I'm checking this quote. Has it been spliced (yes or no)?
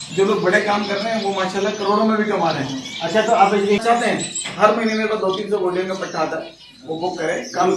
yes